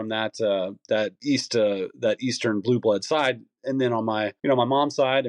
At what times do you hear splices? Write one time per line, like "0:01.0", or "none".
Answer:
0:01.2
0:04.3